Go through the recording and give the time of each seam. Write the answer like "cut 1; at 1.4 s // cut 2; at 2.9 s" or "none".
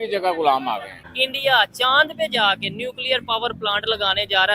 cut 1; at 0.9 s